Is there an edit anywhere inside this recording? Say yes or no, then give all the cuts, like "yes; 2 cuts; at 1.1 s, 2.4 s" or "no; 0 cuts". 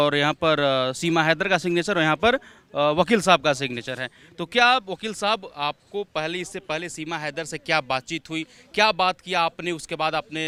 no; 0 cuts